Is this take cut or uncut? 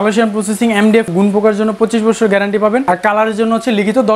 cut